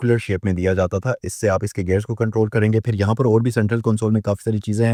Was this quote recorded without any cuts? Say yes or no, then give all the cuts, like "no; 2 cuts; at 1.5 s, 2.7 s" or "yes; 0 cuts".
yes; 0 cuts